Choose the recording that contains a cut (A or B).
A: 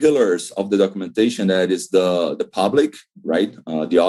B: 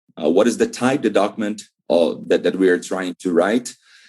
B